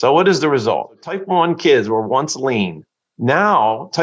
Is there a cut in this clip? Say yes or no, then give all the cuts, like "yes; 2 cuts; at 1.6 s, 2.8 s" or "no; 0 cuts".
yes; 1 cut; at 1.1 s